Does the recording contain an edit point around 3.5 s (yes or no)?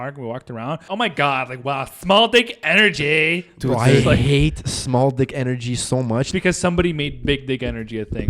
no